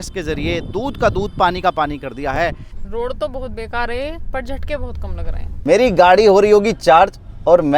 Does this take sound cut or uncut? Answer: cut